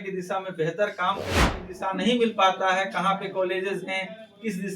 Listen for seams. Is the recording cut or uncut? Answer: cut